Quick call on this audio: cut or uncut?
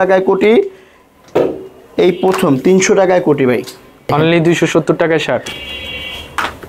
cut